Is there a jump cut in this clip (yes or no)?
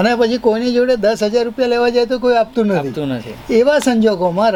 no